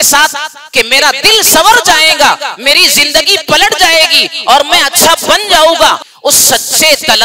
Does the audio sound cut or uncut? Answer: cut